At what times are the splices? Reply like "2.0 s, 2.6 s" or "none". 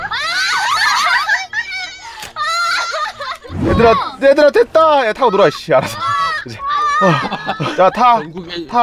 3.5 s